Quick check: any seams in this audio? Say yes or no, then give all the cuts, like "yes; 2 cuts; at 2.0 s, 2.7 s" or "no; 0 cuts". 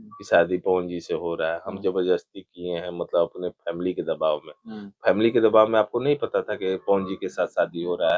no; 0 cuts